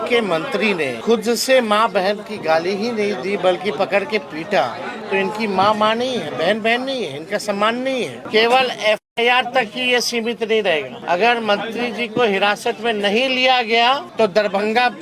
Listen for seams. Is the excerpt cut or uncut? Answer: cut